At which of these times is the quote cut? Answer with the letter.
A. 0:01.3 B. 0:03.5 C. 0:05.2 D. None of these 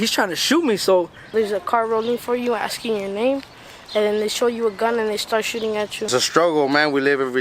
A